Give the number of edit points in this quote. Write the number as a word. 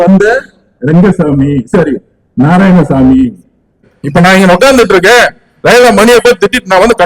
one